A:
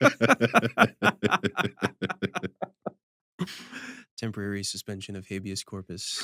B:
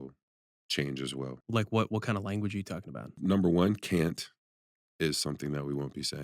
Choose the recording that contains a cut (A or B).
B